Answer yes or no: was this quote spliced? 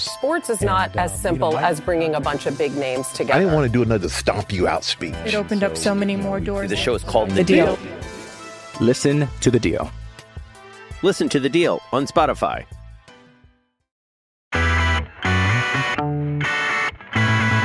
yes